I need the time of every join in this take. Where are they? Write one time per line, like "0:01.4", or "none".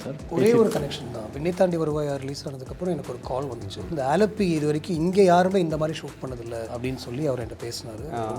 0:03.9
0:06.7